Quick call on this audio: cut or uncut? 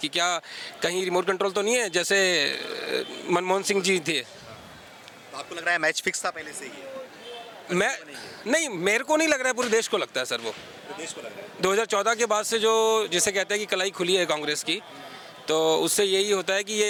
uncut